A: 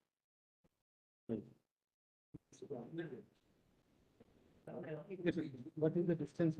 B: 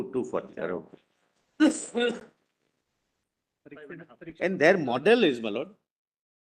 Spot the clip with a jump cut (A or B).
A